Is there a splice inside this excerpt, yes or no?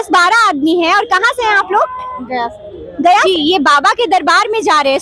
yes